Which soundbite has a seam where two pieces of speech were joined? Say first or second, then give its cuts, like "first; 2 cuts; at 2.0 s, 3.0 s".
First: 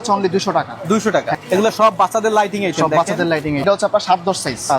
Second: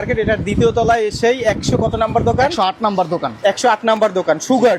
first; 2 cuts; at 1.4 s, 3.6 s